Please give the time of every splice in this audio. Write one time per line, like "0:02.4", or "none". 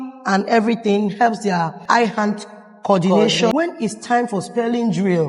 0:01.8
0:03.5